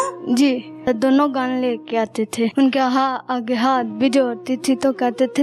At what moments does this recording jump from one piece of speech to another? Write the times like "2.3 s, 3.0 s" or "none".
0.9 s, 2.5 s

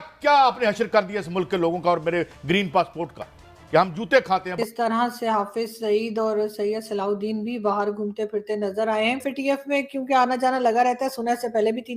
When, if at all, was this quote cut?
4.5 s, 9.2 s

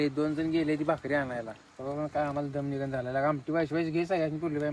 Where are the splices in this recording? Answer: none

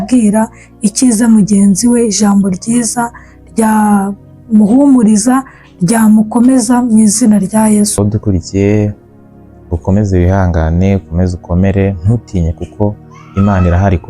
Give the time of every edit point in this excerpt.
8.0 s

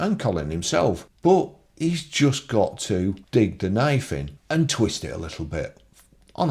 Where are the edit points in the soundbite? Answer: 1.1 s, 3.2 s, 4.3 s

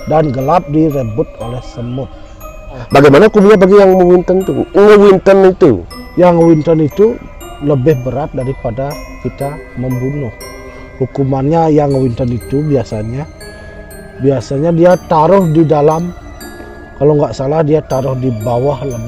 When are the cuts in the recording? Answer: 2.8 s

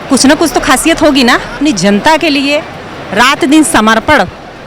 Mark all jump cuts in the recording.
1.6 s

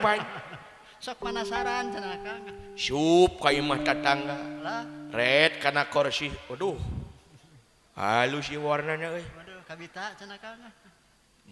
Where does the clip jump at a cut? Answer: none

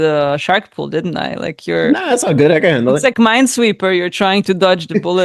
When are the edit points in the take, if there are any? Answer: none

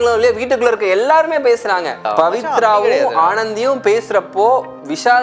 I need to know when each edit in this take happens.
2.1 s

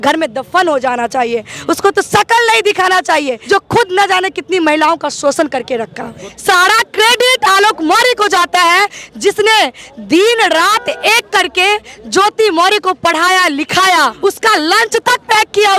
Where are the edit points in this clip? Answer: 3.4 s, 6.3 s, 14.1 s

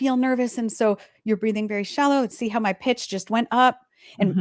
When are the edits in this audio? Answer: 2.3 s

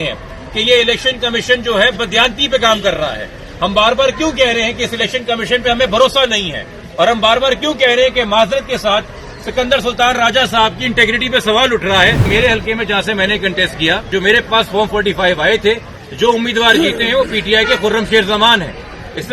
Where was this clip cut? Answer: 12.2 s, 14.1 s, 16.0 s

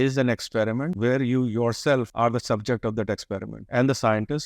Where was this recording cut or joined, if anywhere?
0.9 s, 2.1 s, 3.5 s

